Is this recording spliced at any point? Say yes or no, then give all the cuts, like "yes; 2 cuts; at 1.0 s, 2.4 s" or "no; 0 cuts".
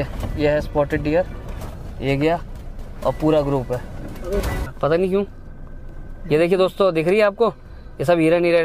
yes; 1 cut; at 4.5 s